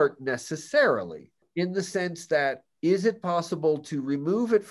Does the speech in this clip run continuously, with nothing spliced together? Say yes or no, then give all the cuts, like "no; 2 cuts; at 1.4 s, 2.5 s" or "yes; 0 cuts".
no; 1 cut; at 1.4 s